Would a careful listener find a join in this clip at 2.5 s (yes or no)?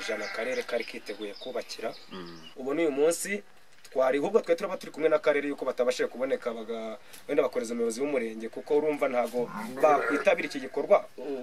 yes